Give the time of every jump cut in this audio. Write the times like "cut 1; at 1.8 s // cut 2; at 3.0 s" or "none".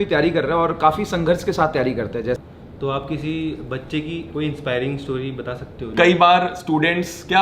cut 1; at 2.4 s // cut 2; at 5.9 s